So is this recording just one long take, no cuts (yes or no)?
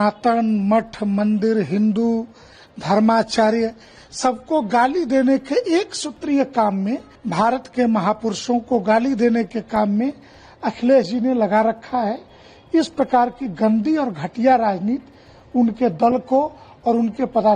no